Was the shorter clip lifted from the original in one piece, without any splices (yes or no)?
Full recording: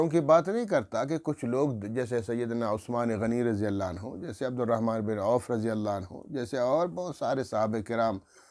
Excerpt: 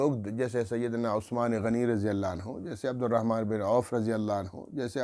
yes